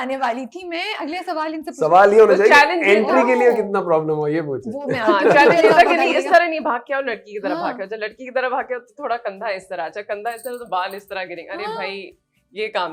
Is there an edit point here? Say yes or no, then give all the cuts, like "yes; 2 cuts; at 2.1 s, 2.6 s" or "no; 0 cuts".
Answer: no; 0 cuts